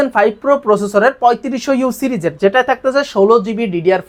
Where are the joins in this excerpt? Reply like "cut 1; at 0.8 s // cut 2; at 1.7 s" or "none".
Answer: none